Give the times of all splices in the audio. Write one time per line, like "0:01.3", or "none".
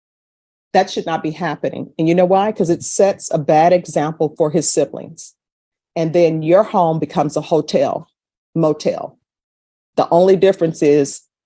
none